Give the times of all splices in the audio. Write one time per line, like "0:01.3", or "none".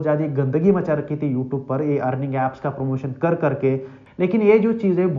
0:04.0